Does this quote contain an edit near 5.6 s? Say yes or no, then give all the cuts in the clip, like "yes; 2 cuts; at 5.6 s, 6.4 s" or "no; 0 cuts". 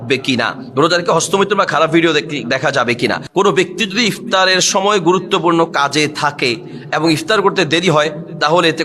no; 1 cut; at 3.2 s